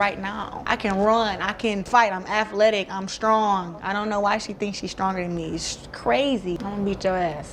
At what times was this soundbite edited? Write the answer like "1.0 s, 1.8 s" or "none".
6.5 s